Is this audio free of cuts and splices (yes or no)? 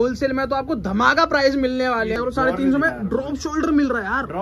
no